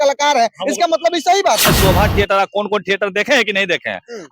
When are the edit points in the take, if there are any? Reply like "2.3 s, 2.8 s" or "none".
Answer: 1.6 s